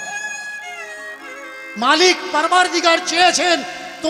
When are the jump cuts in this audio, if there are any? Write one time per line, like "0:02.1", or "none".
none